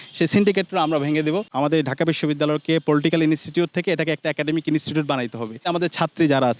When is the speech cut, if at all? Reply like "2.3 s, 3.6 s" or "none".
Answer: 1.5 s, 5.7 s